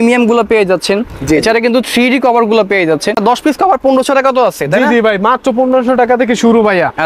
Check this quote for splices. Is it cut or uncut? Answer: cut